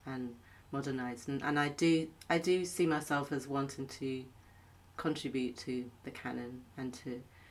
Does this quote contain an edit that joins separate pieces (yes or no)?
no